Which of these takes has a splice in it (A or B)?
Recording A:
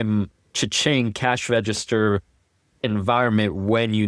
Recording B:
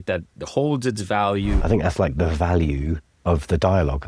B